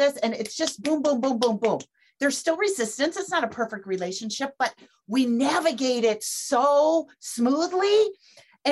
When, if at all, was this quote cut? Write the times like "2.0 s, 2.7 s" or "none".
2.0 s